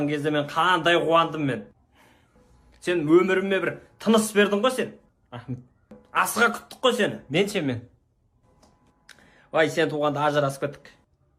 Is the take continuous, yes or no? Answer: yes